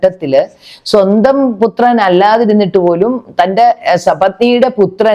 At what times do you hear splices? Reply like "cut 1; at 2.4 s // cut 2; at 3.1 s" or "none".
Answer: none